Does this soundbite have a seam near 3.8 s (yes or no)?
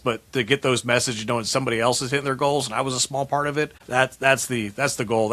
yes